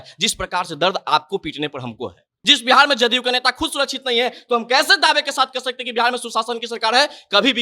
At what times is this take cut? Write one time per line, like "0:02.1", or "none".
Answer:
0:02.4